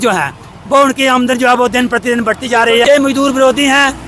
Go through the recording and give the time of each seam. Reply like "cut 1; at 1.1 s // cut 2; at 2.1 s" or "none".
cut 1; at 2.8 s